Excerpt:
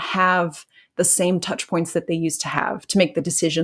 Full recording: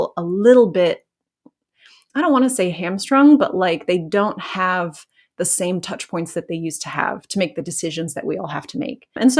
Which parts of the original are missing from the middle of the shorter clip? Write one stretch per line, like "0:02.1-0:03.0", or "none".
none